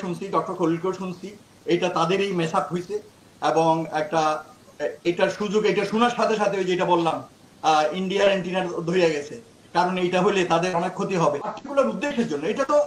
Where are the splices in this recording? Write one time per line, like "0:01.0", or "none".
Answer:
0:11.6